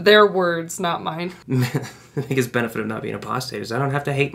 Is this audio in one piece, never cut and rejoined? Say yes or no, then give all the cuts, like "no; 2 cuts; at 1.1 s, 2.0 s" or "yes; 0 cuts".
no; 1 cut; at 1.4 s